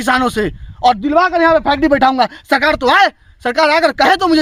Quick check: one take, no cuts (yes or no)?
yes